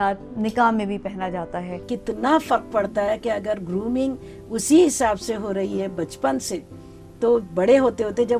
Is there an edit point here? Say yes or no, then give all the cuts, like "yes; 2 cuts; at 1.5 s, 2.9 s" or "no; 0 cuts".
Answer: yes; 1 cut; at 1.8 s